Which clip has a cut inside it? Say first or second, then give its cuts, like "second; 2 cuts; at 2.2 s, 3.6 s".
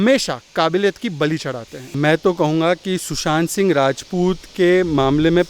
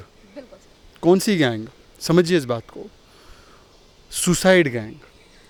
first; 1 cut; at 1.9 s